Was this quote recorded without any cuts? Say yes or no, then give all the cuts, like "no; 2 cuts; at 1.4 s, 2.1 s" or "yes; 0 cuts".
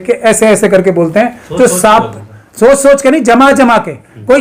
yes; 0 cuts